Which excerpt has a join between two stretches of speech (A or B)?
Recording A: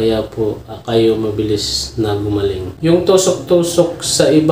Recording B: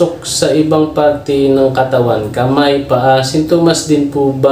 A